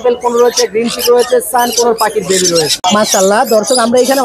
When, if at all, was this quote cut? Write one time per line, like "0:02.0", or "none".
0:02.7